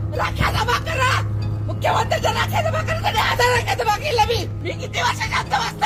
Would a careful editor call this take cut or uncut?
uncut